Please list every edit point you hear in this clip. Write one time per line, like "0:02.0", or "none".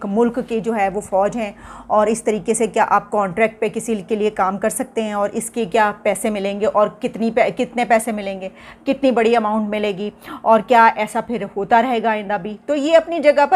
none